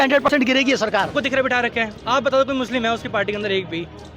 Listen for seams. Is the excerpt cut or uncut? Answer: cut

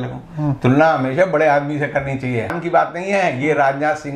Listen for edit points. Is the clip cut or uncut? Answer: cut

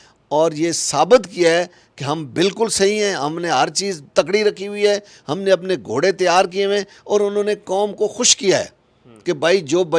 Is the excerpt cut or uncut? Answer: uncut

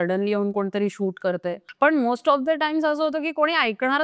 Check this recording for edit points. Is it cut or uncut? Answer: cut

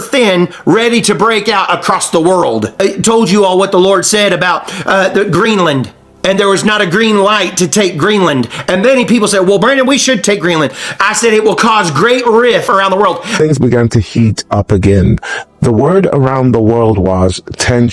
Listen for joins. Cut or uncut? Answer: cut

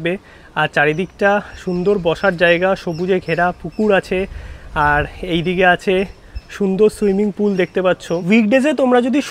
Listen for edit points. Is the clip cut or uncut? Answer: cut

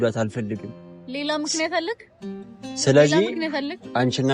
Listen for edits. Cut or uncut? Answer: uncut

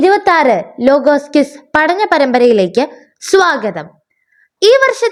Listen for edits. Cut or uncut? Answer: uncut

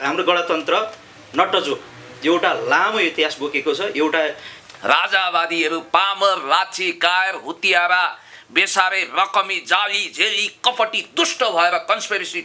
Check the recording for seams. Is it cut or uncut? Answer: cut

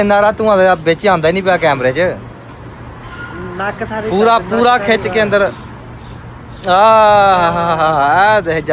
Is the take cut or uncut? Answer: uncut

